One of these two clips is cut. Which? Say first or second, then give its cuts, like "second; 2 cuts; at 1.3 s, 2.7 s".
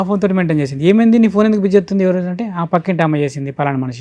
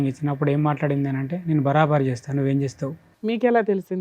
second; 1 cut; at 3.1 s